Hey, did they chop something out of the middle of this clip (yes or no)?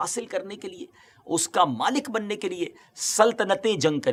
no